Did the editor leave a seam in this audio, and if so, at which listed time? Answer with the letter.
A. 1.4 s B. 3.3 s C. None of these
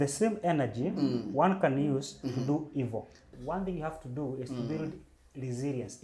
B